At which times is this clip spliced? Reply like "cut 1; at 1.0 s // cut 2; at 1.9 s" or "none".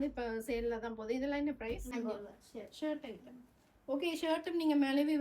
cut 1; at 1.9 s